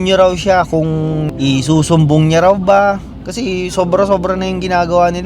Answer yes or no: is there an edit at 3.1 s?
yes